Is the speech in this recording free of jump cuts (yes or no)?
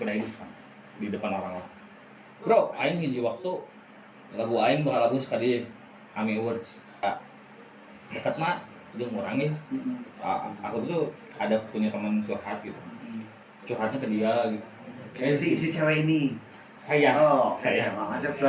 no